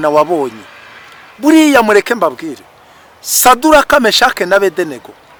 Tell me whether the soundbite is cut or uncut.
uncut